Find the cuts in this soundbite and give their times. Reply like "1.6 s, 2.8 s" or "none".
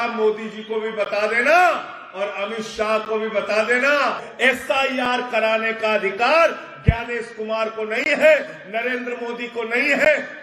4.3 s